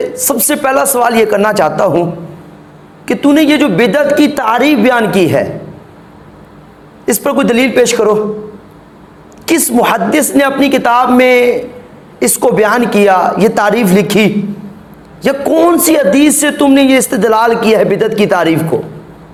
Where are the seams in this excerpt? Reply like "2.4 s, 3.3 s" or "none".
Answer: none